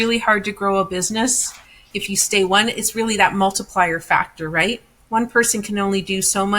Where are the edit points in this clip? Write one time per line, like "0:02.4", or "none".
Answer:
0:01.9